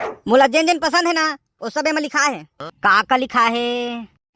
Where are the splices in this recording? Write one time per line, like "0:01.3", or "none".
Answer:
0:02.5